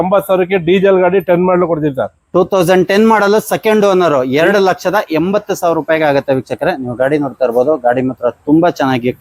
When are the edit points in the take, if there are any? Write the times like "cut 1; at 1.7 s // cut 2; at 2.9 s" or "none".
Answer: none